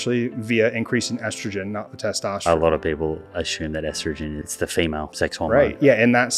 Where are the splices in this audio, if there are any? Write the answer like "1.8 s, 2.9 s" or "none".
2.4 s, 4.5 s, 5.4 s